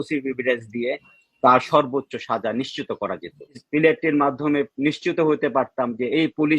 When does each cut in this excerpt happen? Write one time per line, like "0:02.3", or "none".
0:03.6